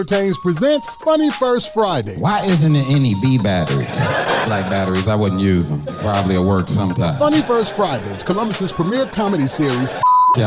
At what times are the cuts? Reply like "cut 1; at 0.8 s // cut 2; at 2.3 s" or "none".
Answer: cut 1; at 4.4 s